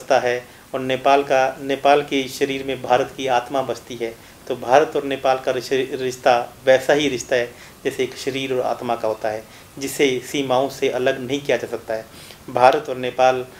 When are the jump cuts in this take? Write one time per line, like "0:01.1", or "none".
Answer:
none